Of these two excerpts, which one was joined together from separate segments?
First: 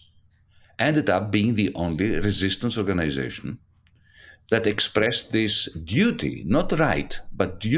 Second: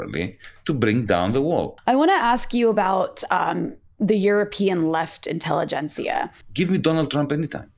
second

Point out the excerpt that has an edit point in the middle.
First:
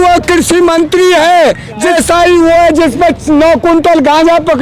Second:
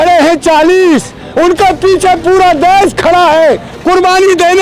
first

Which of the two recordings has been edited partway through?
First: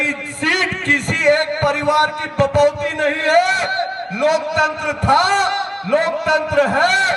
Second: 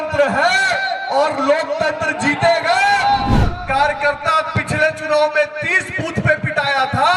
second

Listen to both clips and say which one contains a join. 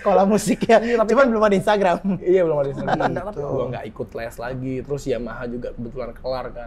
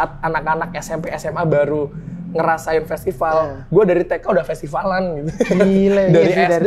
first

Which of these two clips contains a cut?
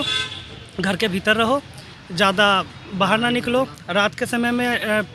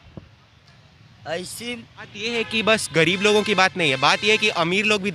second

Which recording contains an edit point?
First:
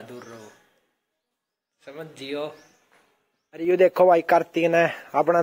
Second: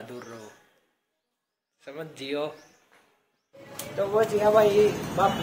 second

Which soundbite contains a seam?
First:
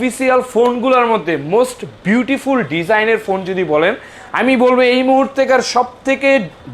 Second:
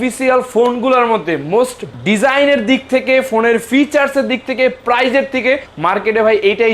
second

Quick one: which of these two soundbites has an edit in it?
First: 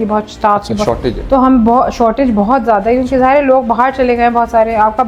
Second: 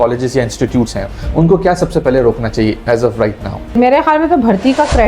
second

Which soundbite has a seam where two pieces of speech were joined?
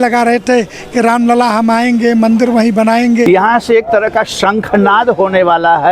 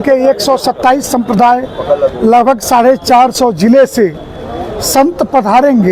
first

